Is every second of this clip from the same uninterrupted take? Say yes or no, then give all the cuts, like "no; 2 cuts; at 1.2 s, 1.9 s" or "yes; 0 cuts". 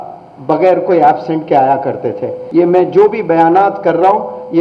no; 1 cut; at 2.3 s